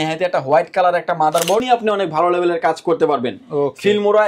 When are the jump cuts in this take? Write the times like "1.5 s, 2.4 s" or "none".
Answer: 1.6 s